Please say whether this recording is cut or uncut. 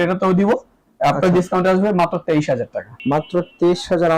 cut